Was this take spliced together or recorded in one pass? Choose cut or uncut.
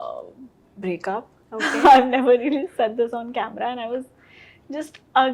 uncut